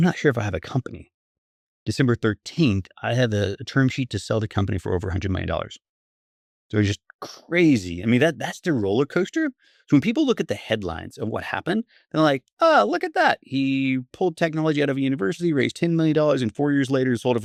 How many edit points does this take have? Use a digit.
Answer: 0